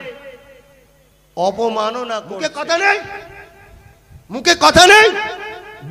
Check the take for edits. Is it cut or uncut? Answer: cut